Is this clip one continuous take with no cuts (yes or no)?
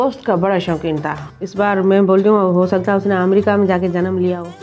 no